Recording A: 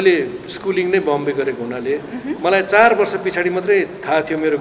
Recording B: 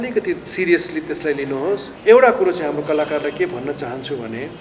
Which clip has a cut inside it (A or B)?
B